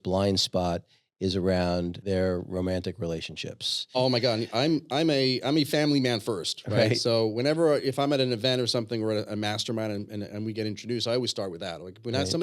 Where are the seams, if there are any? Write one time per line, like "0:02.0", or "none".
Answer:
0:02.0
0:04.0